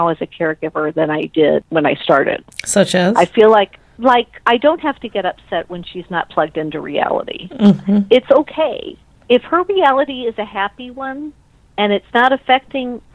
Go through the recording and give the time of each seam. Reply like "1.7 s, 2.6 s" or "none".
none